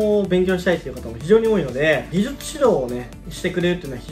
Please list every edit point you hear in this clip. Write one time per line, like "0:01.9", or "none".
none